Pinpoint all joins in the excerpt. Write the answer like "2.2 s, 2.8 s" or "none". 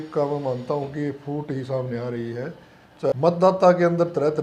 3.1 s